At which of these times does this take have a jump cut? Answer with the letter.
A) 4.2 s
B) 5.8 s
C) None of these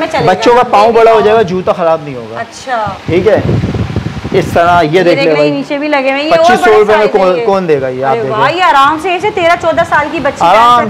C